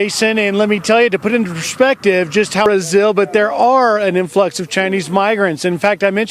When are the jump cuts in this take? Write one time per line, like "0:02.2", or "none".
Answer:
0:02.7

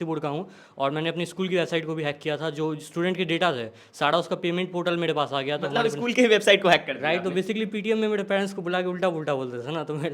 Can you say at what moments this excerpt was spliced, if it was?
0:05.7

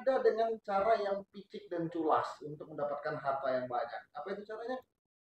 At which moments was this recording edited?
none

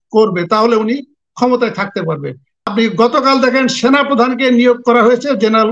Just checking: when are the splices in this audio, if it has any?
0:02.7

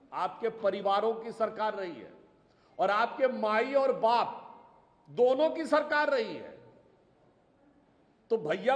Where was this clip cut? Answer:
none

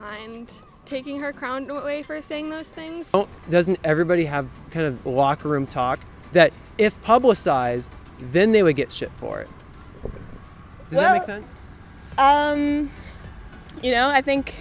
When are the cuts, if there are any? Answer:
0:03.1

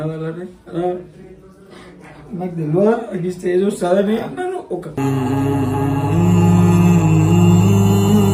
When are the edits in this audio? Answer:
none

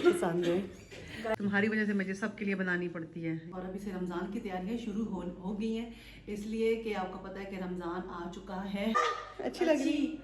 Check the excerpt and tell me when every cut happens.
0:01.4
0:03.5
0:09.0

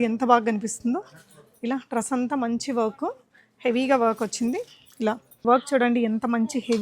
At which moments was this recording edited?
0:05.4

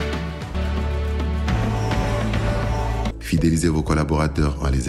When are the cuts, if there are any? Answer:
0:03.2

